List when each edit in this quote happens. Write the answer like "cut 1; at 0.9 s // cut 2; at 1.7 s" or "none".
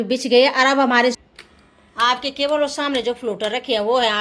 cut 1; at 1.2 s